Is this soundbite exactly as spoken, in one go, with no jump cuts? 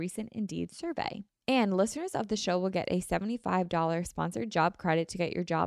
no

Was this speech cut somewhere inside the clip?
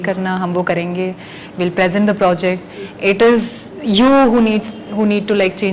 no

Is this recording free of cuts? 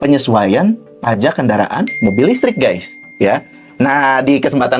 yes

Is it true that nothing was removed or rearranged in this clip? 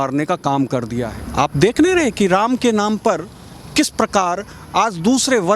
no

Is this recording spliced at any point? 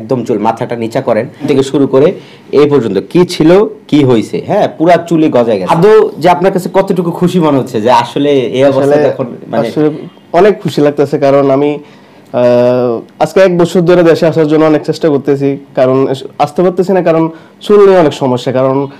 yes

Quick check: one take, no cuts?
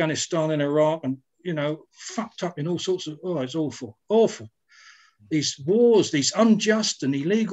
yes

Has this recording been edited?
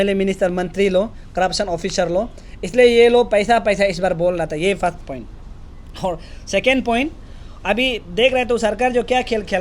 no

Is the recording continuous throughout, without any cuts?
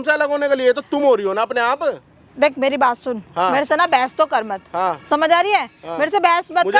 yes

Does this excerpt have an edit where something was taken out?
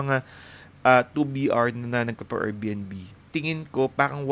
yes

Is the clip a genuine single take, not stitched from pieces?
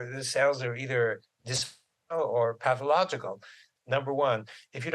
no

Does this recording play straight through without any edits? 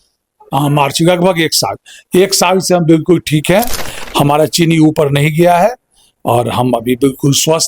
yes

